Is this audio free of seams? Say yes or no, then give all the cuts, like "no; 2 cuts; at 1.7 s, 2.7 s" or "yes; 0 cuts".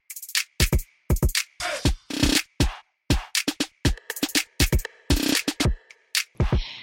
no; 1 cut; at 5.6 s